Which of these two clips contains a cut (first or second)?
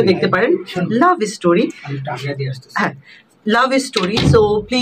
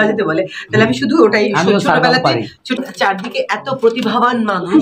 second